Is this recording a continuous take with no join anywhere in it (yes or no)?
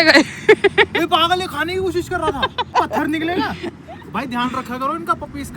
no